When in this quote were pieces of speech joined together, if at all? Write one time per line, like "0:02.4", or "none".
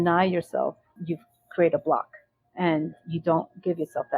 0:01.0